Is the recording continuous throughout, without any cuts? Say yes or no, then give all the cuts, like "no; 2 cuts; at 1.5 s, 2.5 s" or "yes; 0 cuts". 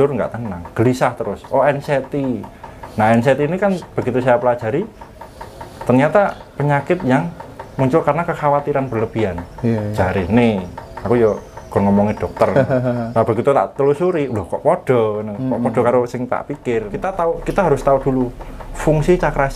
no; 1 cut; at 17.2 s